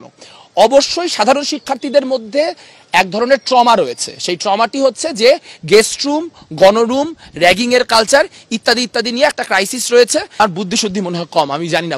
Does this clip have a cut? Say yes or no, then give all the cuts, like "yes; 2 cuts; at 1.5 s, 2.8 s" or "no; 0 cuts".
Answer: yes; 1 cut; at 10.3 s